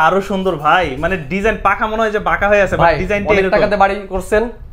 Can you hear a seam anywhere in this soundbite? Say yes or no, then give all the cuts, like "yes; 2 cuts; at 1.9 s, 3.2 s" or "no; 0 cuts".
no; 0 cuts